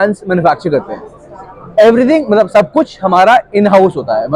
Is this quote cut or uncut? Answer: uncut